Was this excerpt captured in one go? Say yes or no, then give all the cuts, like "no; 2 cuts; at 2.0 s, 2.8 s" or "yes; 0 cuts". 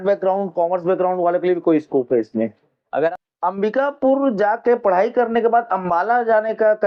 no; 1 cut; at 2.8 s